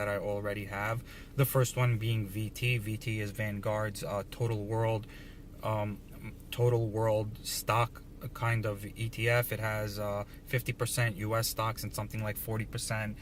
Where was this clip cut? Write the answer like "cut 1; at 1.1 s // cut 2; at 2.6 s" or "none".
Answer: cut 1; at 1.6 s